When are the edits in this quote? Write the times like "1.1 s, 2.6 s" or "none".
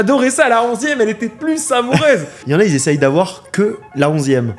2.4 s